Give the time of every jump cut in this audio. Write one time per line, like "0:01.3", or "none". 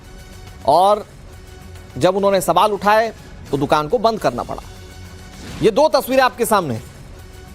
0:06.1